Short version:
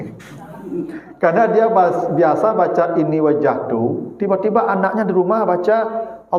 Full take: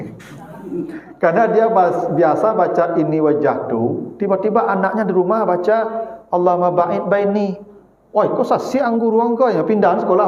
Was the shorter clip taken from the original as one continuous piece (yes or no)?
yes